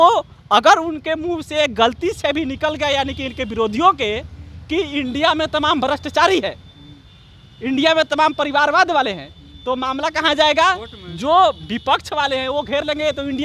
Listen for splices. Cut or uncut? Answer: uncut